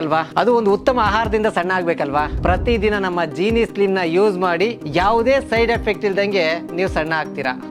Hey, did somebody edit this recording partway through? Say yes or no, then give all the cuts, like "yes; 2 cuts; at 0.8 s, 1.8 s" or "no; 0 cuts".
no; 0 cuts